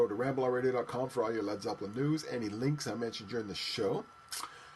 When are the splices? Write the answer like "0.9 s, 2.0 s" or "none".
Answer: none